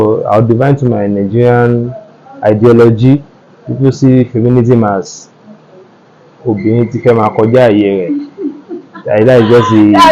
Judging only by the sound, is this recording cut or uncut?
uncut